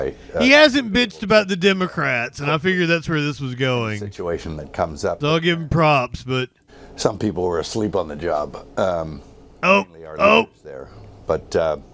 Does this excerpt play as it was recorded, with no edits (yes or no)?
yes